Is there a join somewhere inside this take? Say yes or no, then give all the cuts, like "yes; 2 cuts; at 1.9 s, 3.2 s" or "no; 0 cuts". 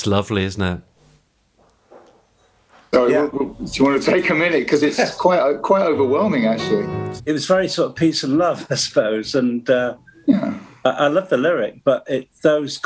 yes; 2 cuts; at 1.0 s, 7.0 s